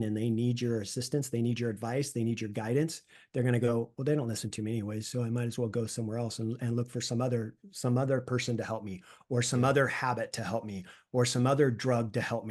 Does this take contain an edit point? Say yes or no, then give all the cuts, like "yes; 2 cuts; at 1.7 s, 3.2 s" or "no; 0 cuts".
no; 0 cuts